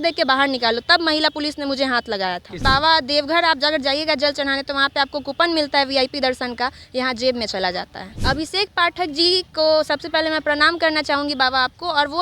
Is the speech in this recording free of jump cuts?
no; 2 cuts; at 2.5 s, 8.1 s

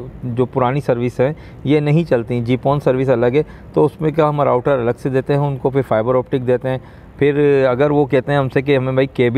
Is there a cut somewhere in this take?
no; 0 cuts

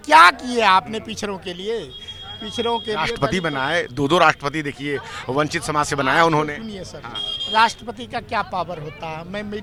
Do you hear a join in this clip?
no; 0 cuts

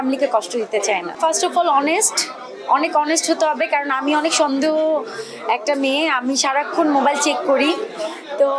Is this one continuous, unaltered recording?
yes; 0 cuts

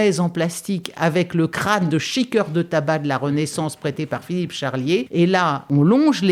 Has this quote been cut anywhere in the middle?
no; 0 cuts

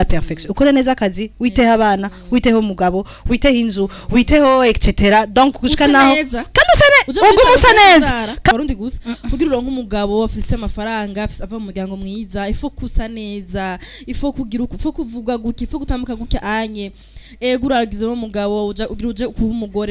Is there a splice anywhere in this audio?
yes; 1 cut; at 8.5 s

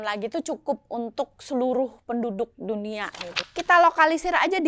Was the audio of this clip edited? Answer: yes; 1 cut; at 3.3 s

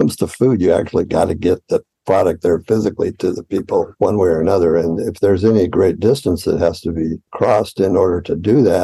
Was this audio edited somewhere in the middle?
yes; 2 cuts; at 3.9 s, 7.3 s

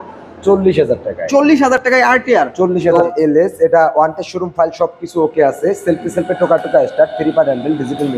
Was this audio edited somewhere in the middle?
no; 0 cuts

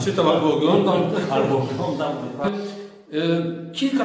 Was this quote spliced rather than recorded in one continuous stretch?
yes; 1 cut; at 2.5 s

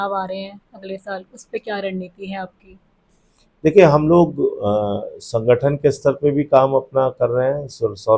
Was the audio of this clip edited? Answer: no; 0 cuts

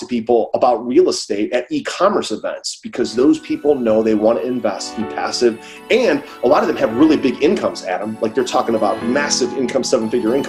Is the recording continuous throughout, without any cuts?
yes; 0 cuts

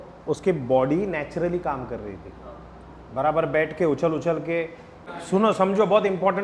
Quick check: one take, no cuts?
no; 1 cut; at 5.1 s

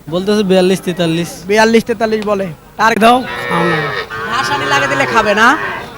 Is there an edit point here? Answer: yes; 1 cut; at 3.0 s

